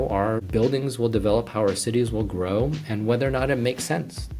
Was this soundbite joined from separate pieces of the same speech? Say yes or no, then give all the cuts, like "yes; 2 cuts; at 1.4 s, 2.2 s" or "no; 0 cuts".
no; 0 cuts